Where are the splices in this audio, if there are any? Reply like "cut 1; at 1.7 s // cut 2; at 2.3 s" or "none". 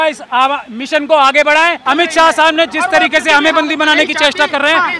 cut 1; at 1.8 s